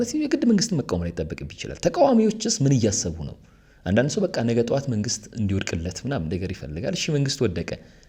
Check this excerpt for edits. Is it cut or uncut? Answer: uncut